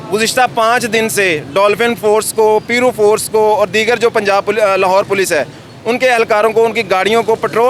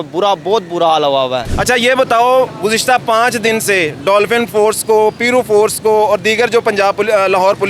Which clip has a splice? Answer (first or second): second